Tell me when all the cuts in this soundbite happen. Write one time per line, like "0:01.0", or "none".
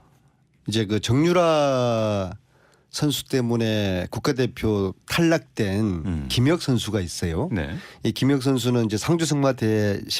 0:08.9